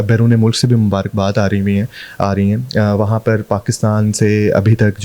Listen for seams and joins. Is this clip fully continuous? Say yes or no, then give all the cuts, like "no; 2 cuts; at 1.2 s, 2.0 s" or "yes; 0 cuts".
yes; 0 cuts